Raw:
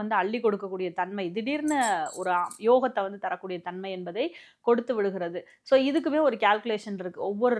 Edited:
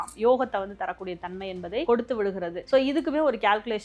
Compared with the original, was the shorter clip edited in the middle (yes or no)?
yes